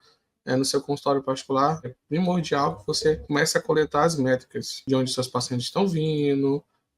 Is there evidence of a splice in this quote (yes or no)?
yes